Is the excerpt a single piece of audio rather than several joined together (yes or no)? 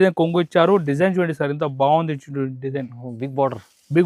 yes